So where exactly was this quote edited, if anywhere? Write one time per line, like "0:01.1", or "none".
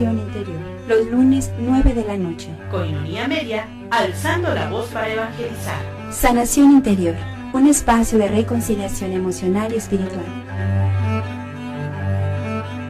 0:07.4